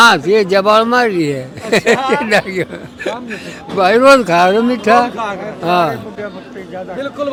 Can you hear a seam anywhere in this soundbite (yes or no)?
no